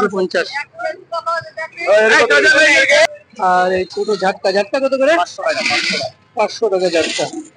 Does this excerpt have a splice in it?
yes; 1 cut; at 3.0 s

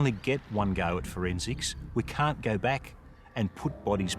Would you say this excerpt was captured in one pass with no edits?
yes; 0 cuts

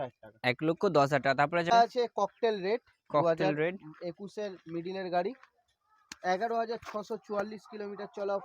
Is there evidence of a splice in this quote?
yes; 1 cut; at 1.7 s

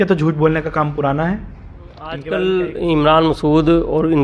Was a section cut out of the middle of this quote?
yes; 1 cut; at 2.2 s

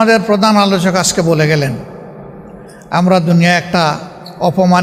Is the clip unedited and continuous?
yes; 0 cuts

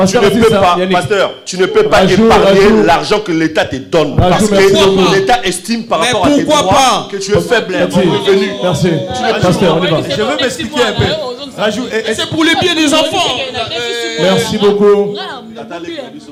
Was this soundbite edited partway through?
no; 0 cuts

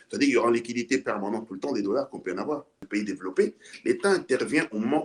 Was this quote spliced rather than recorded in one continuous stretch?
yes; 1 cut; at 2.8 s

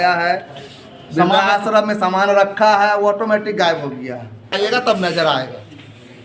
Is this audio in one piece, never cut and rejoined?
no; 1 cut; at 4.5 s

